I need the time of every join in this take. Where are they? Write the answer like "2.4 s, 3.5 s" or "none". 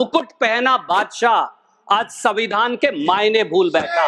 none